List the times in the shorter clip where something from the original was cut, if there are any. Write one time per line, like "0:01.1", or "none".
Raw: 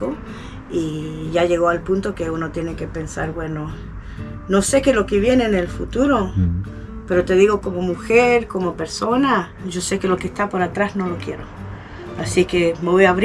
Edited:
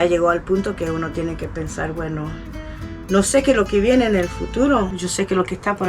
0:04.9